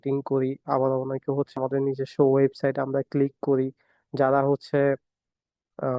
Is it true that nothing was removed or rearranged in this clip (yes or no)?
no